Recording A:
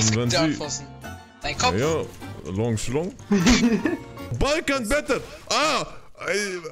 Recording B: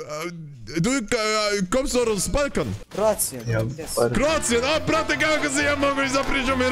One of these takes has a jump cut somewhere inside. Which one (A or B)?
A